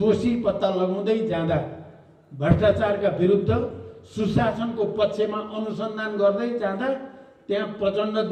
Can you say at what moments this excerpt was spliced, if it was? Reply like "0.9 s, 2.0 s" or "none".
none